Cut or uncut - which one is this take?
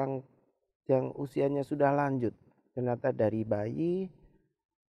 uncut